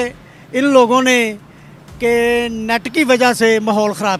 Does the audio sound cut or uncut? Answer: uncut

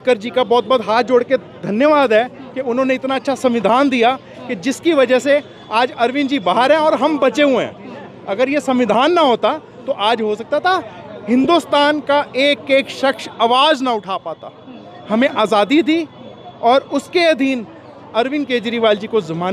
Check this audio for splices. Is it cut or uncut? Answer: uncut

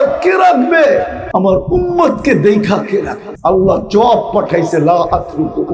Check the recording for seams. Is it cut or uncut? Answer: cut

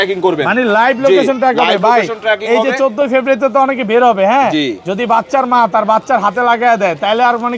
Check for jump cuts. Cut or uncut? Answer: uncut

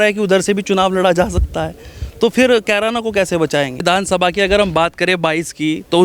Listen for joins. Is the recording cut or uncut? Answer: cut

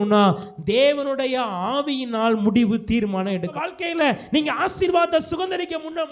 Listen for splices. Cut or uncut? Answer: cut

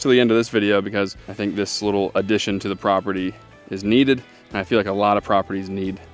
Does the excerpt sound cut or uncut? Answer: cut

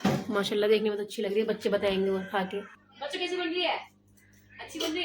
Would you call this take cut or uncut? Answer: cut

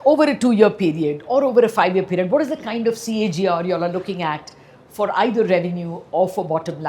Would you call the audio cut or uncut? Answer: uncut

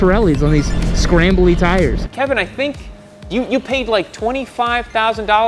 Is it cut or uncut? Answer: cut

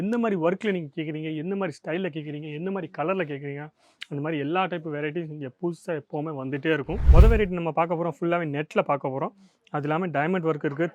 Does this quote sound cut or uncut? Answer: cut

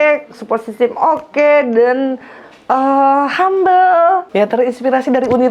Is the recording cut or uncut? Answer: cut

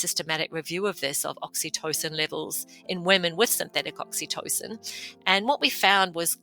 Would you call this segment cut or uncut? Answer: uncut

